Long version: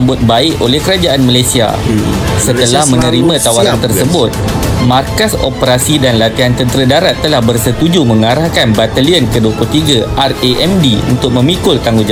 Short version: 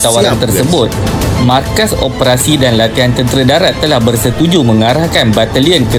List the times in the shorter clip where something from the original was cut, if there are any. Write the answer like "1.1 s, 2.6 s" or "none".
none